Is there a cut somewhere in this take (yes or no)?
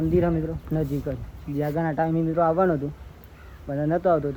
no